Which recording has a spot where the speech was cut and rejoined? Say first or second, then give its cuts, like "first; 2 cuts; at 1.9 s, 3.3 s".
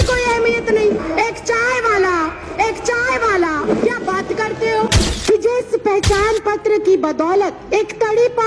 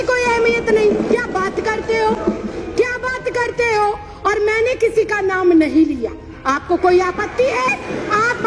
first; 4 cuts; at 1.0 s, 3.7 s, 5.1 s, 7.6 s